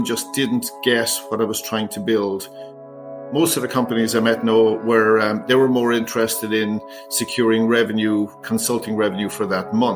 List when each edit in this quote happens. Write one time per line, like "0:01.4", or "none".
0:02.7